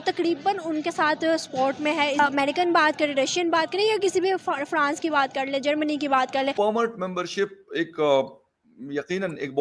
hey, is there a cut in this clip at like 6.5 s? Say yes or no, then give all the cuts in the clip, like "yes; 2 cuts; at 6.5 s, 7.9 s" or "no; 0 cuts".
yes; 2 cuts; at 2.2 s, 6.5 s